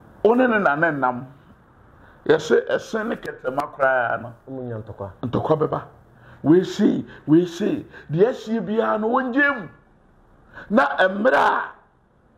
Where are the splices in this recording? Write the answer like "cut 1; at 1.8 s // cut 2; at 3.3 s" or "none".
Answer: none